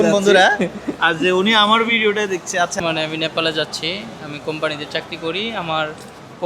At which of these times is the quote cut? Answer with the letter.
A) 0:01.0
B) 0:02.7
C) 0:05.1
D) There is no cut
B